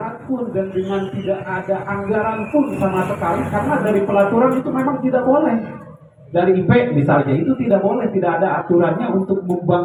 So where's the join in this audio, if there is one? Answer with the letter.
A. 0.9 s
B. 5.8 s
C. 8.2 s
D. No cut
D